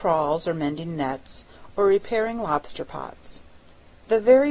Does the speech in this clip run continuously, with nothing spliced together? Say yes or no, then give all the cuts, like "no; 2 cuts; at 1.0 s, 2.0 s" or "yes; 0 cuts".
no; 1 cut; at 2.5 s